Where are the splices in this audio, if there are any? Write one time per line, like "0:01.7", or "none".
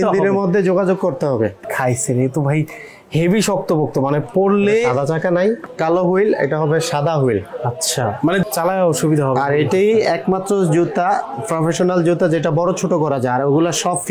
0:01.6
0:05.7
0:08.4

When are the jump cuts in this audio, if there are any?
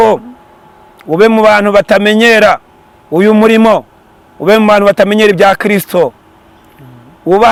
none

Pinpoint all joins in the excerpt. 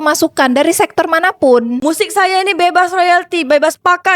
0:01.8

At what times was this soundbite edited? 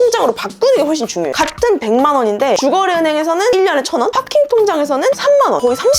0:01.3

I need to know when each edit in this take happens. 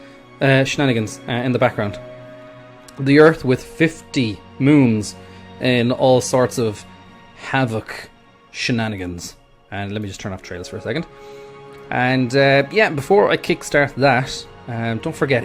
0:02.4

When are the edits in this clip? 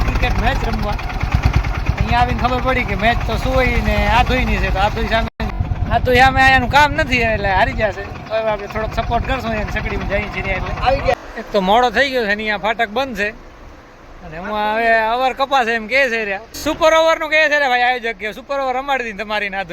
0:05.4
0:11.2
0:16.6

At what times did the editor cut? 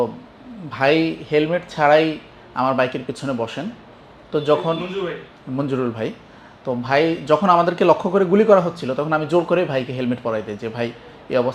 none

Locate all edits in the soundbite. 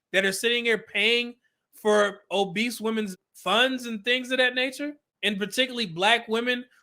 0:03.2
0:05.1

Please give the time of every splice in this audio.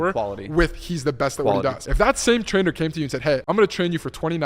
0:01.8
0:03.4

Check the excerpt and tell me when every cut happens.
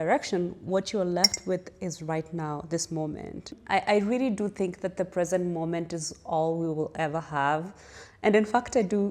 none

